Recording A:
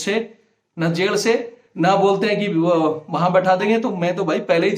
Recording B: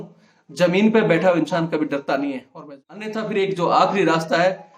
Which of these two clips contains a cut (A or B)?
B